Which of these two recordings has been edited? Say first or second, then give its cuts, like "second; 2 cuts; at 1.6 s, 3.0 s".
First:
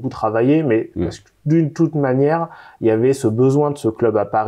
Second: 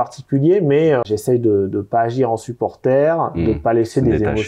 second; 1 cut; at 1.1 s